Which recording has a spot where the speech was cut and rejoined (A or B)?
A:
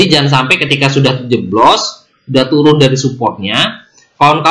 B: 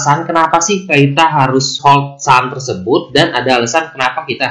B